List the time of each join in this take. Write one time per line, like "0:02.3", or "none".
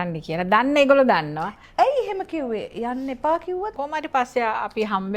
0:03.7